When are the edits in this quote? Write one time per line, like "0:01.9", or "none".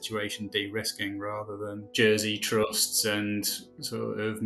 0:01.9